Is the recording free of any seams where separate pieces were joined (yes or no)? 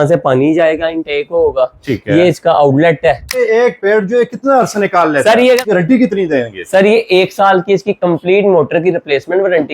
no